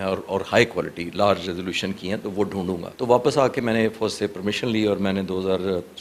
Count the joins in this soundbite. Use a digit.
1